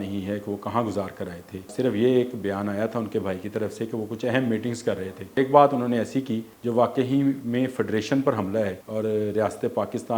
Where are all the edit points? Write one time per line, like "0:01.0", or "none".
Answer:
0:01.7
0:05.4
0:06.5
0:08.8